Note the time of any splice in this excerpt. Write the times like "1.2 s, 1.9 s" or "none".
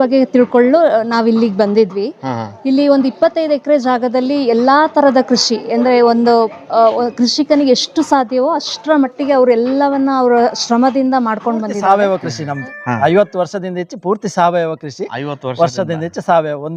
11.7 s